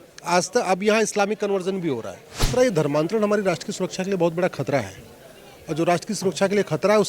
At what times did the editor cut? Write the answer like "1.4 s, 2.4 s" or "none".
2.5 s